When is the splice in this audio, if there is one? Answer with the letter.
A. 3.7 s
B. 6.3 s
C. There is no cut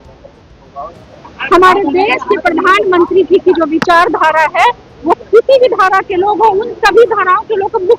C